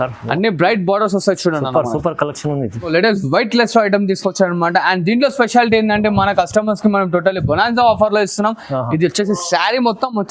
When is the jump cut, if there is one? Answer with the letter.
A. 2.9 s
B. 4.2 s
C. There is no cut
A